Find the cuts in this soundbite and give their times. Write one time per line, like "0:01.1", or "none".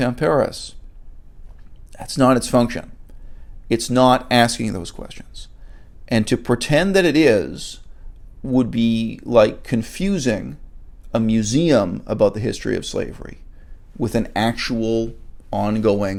none